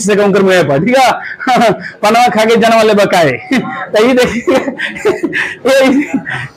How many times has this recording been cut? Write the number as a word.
zero